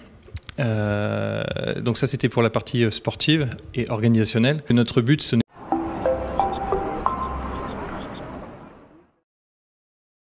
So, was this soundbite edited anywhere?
no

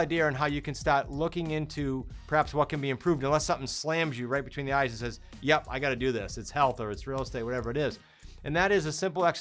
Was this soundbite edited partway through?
no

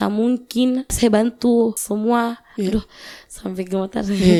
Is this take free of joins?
yes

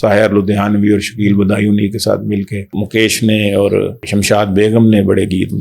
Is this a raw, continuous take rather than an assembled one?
no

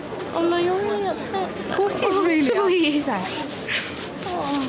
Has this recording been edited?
no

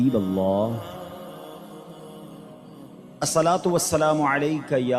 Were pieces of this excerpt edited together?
yes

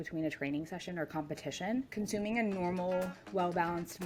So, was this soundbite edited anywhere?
no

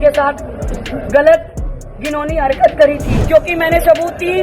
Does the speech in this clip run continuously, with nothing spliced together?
no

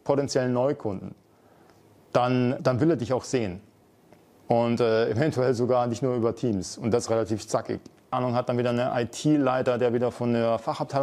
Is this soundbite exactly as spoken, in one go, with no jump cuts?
no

